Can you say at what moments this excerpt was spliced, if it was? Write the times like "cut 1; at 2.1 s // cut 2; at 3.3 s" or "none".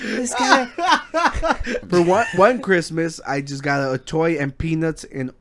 cut 1; at 1.8 s